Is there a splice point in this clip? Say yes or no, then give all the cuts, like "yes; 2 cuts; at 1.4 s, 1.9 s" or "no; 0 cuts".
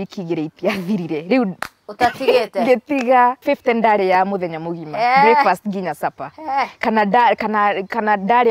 yes; 1 cut; at 3.4 s